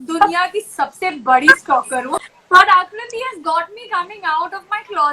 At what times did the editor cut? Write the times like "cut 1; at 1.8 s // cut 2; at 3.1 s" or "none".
cut 1; at 2.2 s